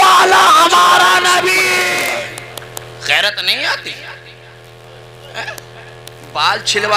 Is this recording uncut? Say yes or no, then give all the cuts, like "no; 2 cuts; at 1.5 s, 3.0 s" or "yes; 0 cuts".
no; 1 cut; at 2.1 s